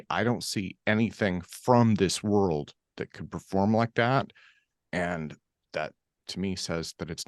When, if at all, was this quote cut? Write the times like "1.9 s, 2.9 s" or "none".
none